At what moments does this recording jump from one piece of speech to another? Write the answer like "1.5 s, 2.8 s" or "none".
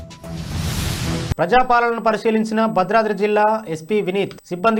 none